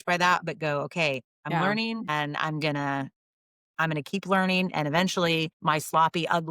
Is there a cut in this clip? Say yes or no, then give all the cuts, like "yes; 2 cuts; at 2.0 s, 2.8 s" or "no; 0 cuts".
yes; 2 cuts; at 1.3 s, 5.5 s